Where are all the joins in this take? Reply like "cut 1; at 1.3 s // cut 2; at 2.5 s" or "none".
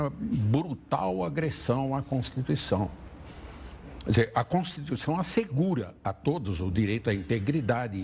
cut 1; at 7.0 s